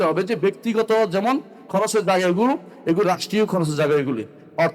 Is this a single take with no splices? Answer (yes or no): yes